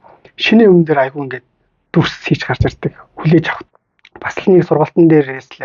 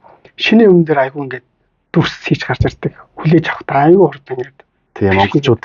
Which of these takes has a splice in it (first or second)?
first